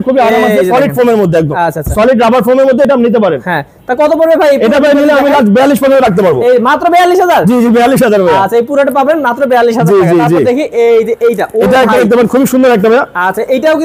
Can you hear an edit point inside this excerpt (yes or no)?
no